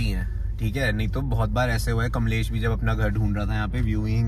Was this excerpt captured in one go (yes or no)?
yes